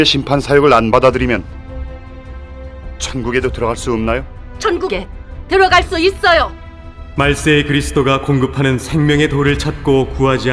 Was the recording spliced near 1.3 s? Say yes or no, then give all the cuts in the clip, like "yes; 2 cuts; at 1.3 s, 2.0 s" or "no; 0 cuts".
yes; 1 cut; at 1.3 s